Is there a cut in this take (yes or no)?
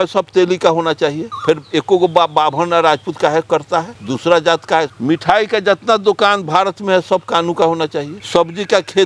yes